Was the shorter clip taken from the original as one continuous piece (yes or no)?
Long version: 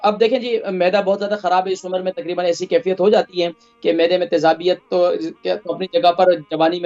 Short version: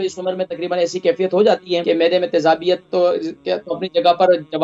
no